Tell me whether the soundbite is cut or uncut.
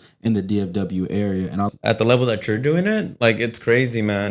cut